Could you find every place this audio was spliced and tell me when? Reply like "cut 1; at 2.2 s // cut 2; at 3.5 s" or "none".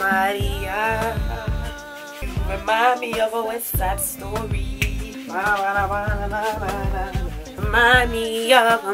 none

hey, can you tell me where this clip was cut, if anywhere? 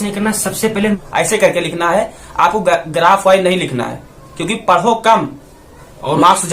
cut 1; at 1.0 s

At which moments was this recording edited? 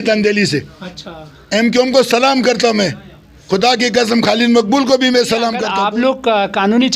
cut 1; at 5.6 s

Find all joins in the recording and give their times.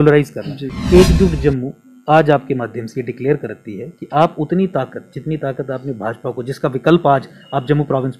none

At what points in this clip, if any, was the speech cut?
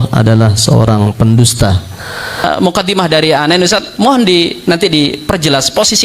cut 1; at 2.4 s

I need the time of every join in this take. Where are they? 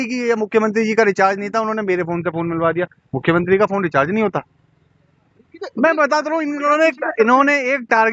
none

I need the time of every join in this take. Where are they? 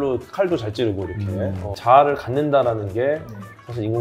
cut 1; at 1.7 s

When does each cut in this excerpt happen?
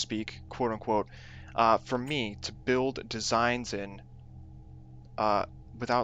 cut 1; at 2.3 s

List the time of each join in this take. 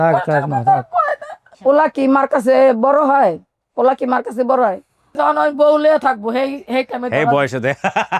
cut 1; at 1.5 s // cut 2; at 5.1 s

